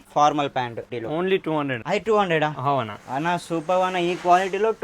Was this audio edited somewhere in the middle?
yes; 2 cuts; at 0.9 s, 1.8 s

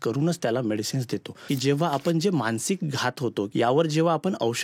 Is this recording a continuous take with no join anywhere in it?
no; 2 cuts; at 1.4 s, 3.5 s

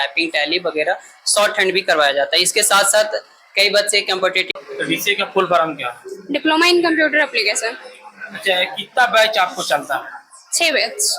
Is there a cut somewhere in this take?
yes; 1 cut; at 4.4 s

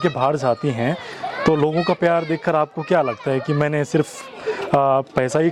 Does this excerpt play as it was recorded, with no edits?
yes; 0 cuts

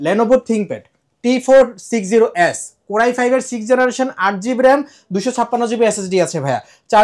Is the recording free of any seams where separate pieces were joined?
yes; 0 cuts

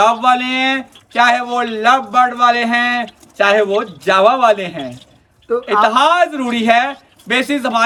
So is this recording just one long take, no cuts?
yes; 0 cuts

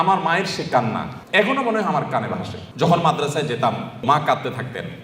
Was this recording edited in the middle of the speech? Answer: yes; 3 cuts; at 1.1 s, 2.6 s, 4.0 s

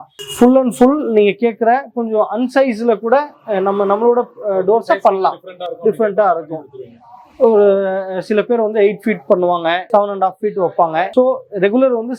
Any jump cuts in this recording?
no; 0 cuts

